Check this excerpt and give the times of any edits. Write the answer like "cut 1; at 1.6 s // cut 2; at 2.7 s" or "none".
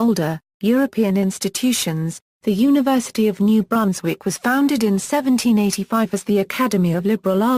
cut 1; at 2.3 s